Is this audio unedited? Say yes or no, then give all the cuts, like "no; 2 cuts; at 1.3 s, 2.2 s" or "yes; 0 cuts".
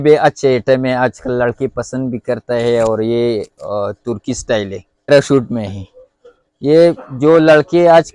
no; 1 cut; at 5.1 s